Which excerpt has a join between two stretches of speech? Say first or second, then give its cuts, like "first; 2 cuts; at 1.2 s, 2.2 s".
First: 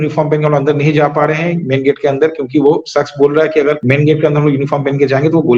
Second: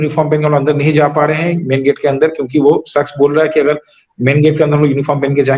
first; 1 cut; at 3.8 s